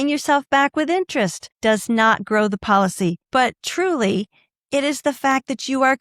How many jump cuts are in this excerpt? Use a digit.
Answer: 0